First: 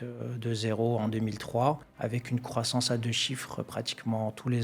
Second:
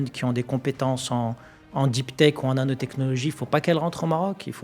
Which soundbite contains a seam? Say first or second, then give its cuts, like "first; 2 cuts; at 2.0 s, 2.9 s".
first; 1 cut; at 1.9 s